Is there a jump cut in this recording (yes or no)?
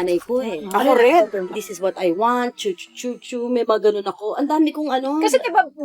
yes